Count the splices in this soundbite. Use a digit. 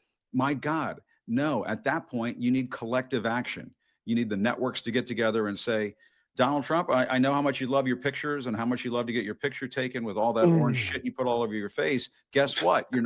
0